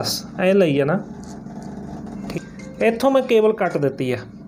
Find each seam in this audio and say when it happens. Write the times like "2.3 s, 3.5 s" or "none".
2.2 s